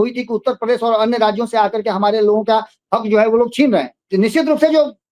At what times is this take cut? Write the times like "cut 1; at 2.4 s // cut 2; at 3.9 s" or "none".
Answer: cut 1; at 4.0 s